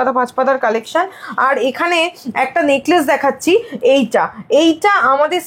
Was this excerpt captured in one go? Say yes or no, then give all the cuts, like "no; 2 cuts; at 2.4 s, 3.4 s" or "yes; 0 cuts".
yes; 0 cuts